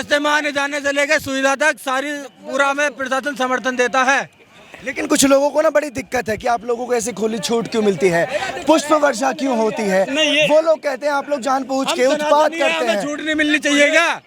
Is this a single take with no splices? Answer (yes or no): yes